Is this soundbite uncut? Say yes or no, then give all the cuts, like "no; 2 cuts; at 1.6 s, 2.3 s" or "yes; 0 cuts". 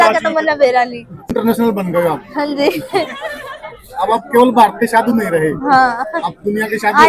no; 1 cut; at 1.3 s